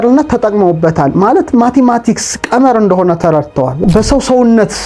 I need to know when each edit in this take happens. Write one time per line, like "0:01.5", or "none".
0:03.8